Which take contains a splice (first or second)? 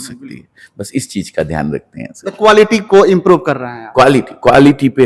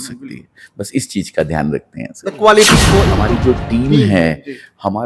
second